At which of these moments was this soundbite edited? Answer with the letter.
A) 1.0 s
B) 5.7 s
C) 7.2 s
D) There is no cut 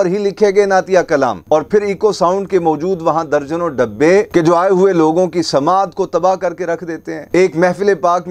D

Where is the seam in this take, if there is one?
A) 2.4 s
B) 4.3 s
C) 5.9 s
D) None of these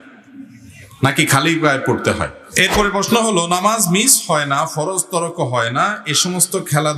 A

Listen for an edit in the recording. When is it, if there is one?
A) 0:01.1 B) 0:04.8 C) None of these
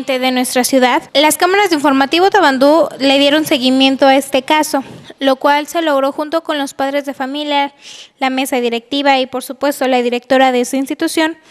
A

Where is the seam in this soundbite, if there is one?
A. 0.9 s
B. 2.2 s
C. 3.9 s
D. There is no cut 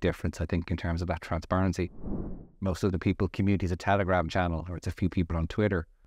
B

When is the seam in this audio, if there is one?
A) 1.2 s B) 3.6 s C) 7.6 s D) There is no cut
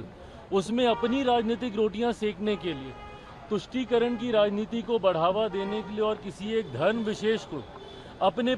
D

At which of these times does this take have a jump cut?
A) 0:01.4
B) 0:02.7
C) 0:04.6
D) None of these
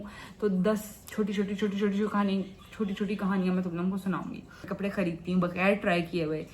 C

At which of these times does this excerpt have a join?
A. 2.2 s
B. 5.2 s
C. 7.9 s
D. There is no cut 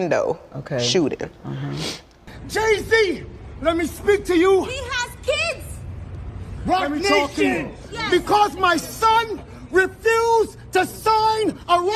A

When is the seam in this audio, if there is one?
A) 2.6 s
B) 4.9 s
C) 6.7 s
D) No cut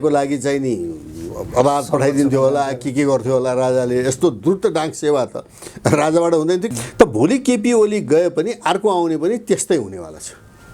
C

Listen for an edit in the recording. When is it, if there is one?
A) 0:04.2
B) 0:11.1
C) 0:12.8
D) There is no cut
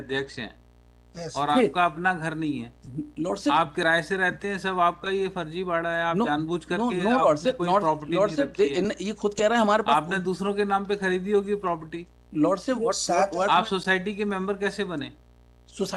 D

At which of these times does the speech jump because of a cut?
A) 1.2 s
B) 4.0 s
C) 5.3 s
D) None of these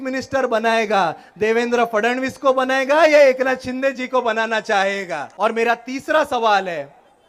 C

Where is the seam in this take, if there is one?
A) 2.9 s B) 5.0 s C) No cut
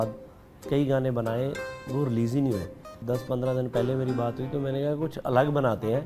A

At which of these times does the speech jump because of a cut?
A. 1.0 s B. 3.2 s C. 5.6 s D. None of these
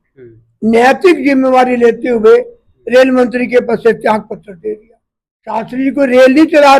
C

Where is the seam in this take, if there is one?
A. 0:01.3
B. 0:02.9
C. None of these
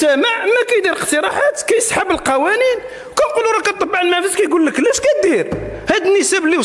C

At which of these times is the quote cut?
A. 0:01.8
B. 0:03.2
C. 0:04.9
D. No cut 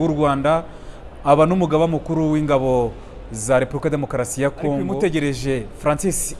C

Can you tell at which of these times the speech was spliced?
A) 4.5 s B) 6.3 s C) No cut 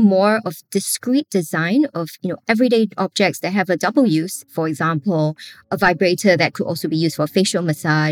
A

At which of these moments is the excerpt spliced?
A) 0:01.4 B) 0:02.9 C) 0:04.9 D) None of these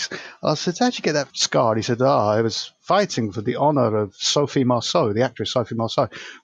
A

